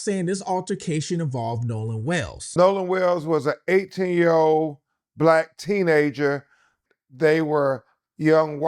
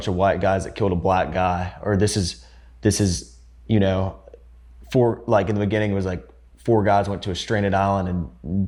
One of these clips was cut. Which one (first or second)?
first